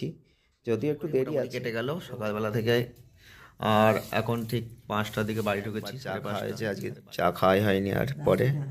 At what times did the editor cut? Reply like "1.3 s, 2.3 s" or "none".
1.6 s, 6.2 s